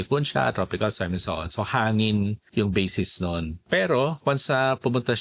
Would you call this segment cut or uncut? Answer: cut